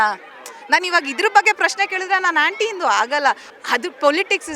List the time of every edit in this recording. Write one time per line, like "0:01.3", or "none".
0:03.5